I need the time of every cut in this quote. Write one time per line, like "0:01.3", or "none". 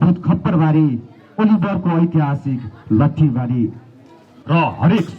0:04.3